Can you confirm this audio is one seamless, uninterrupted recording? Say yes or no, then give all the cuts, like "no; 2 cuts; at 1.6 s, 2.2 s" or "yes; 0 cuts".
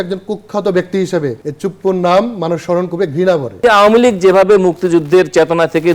no; 2 cuts; at 1.4 s, 3.6 s